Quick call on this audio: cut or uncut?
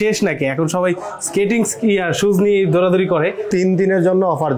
cut